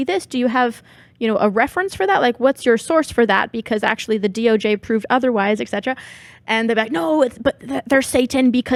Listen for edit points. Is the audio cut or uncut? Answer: uncut